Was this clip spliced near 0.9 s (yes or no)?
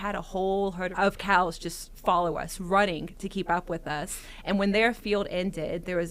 yes